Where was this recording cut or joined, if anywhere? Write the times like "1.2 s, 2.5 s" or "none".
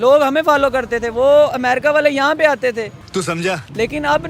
3.2 s